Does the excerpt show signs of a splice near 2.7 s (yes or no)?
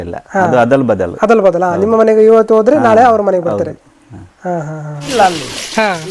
no